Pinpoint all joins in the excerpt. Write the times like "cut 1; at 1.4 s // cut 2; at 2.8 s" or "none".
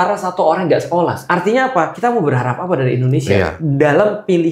cut 1; at 1.2 s // cut 2; at 1.9 s // cut 3; at 3.6 s